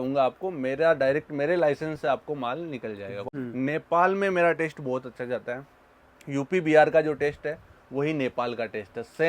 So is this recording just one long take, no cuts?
no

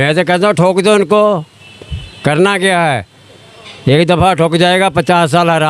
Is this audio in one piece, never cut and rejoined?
yes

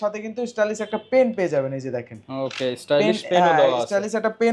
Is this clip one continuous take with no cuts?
yes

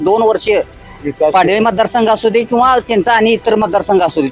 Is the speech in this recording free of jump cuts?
yes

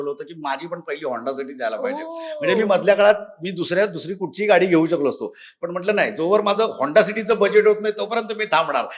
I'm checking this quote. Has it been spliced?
no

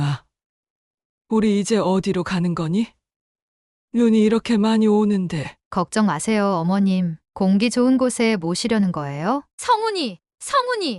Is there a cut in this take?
yes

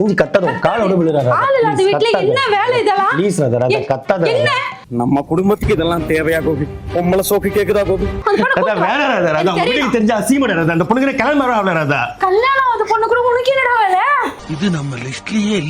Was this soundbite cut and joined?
yes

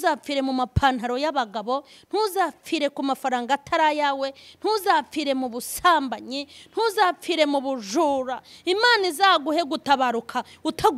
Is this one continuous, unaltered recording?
yes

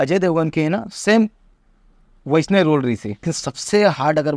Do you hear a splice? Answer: yes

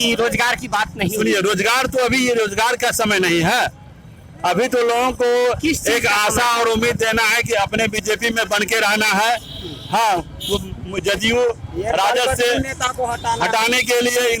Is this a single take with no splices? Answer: yes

